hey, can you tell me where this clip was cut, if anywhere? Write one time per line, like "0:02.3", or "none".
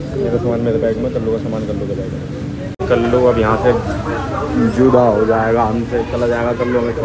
0:02.7